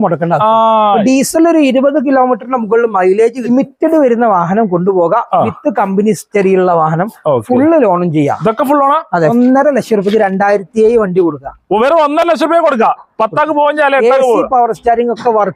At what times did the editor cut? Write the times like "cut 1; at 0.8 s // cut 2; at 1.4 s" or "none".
cut 1; at 3.5 s // cut 2; at 9.3 s

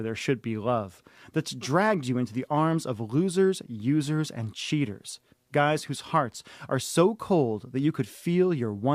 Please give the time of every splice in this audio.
none

